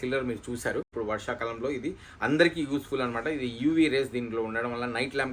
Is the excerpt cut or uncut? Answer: cut